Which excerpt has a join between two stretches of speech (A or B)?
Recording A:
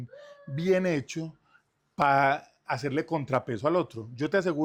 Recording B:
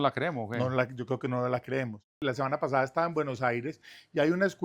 B